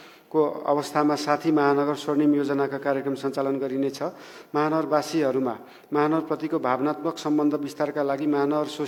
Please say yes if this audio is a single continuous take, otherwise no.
yes